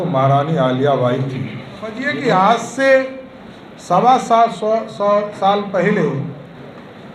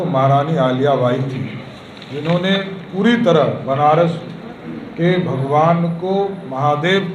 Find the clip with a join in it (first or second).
first